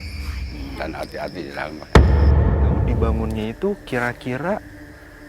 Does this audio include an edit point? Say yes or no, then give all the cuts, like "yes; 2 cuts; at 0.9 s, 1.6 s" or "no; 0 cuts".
yes; 1 cut; at 2.9 s